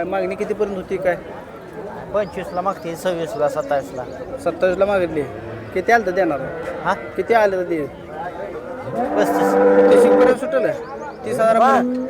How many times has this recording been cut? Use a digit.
0